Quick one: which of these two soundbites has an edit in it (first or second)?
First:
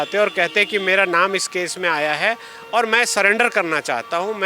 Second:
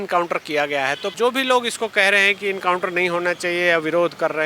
second